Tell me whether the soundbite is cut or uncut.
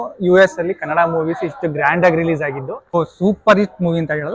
cut